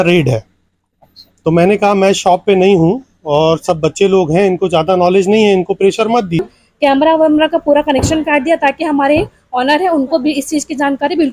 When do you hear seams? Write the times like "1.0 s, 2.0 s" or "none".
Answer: 6.5 s